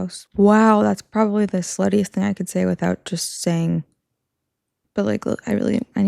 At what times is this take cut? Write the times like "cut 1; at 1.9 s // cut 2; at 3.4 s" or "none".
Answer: none